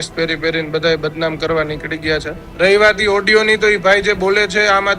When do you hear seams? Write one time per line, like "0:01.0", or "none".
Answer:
0:02.4